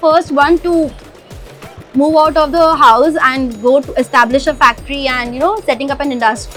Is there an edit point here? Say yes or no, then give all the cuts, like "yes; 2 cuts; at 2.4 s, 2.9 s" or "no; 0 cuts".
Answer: no; 0 cuts